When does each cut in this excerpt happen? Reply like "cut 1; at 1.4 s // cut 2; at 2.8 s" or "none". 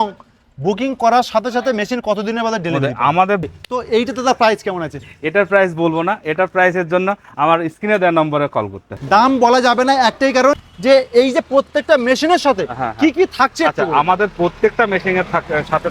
cut 1; at 3.6 s // cut 2; at 9.0 s // cut 3; at 10.6 s